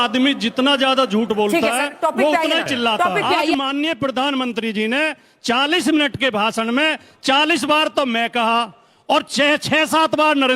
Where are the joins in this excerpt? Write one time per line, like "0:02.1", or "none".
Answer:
0:03.4